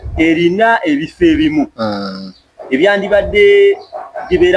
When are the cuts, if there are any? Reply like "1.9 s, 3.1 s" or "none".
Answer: none